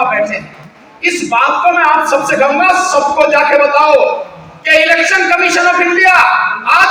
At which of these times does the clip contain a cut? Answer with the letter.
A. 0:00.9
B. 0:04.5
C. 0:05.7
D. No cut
D